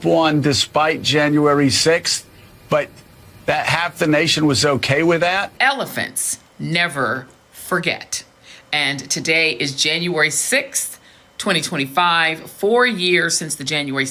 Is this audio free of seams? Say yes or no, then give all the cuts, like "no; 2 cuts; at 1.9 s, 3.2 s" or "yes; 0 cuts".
no; 1 cut; at 5.5 s